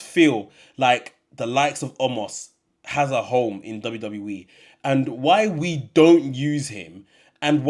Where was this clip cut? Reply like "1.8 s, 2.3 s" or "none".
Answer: none